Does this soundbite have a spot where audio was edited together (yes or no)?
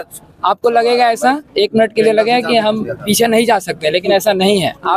no